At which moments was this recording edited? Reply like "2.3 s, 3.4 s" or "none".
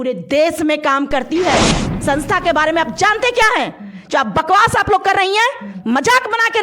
1.8 s